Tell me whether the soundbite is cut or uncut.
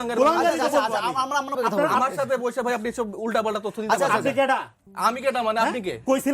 cut